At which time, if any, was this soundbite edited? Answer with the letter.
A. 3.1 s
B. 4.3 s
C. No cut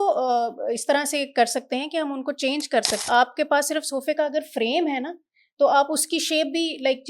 A